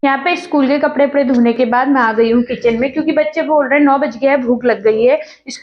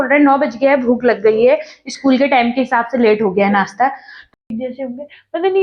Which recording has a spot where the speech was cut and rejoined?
second; 1 cut; at 4.3 s

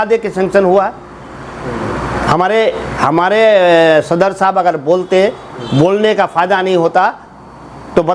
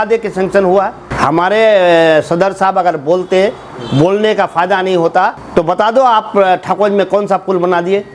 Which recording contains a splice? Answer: second; 2 cuts; at 1.1 s, 5.4 s

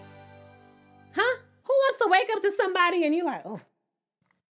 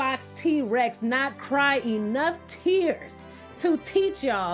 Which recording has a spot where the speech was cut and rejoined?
first; 1 cut; at 1.6 s

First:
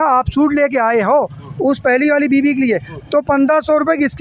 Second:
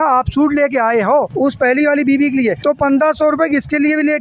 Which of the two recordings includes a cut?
second; 2 cuts; at 1.3 s, 2.6 s

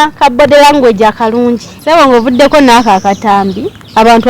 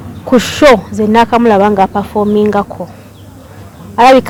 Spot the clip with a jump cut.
first; 1 cut; at 1.7 s

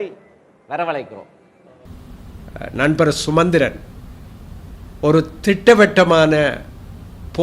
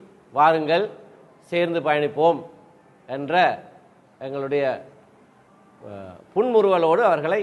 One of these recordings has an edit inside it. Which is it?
first; 1 cut; at 1.8 s

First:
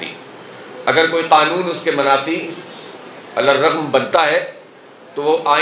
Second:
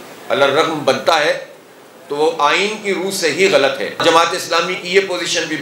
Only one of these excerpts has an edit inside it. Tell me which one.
second; 1 cut; at 4.0 s

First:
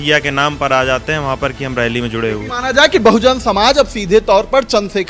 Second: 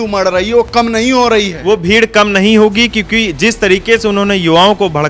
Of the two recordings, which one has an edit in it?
first; 1 cut; at 2.5 s

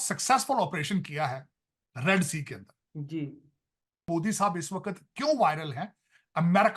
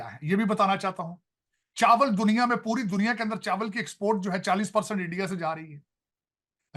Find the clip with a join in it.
first; 1 cut; at 4.1 s

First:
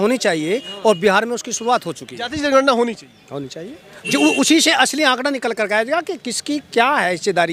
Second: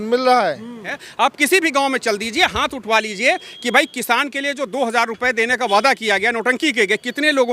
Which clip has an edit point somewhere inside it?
second; 1 cut; at 1.0 s

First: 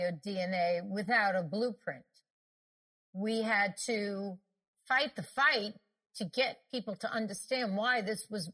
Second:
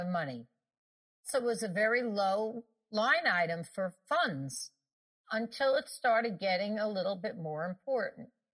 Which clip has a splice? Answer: second; 4 cuts; at 1.3 s, 2.9 s, 4.0 s, 5.2 s

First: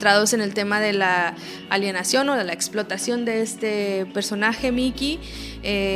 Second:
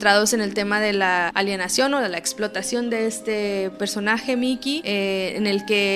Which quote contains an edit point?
second; 2 cuts; at 1.3 s, 4.8 s

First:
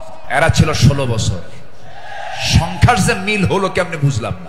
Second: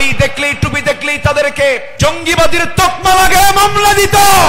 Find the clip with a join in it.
second; 1 cut; at 1.9 s

